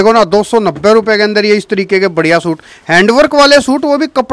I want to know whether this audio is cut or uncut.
uncut